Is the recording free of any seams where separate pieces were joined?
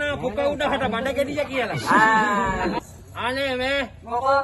no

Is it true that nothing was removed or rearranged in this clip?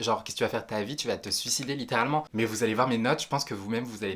no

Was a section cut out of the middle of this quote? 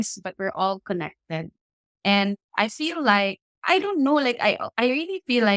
yes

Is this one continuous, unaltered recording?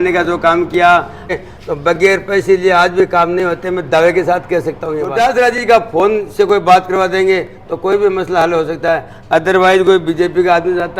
no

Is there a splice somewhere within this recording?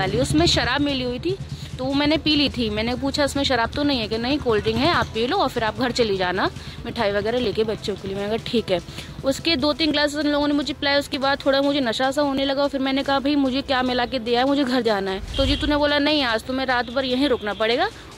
yes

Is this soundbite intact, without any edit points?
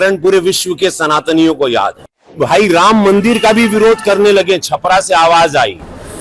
no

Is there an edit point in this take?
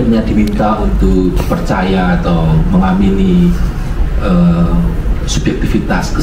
no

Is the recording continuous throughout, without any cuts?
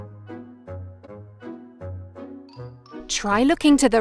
no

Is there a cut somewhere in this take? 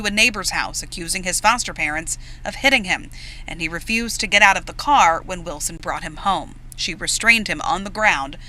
yes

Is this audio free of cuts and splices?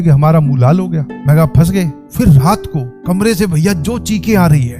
no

